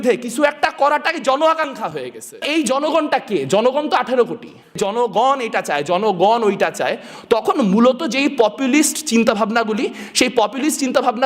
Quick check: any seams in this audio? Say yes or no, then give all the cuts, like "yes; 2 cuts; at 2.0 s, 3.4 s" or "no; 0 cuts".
yes; 2 cuts; at 2.4 s, 4.8 s